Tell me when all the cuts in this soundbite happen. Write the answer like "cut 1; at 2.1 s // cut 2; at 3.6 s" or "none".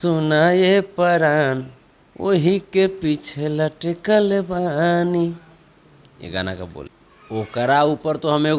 cut 1; at 6.8 s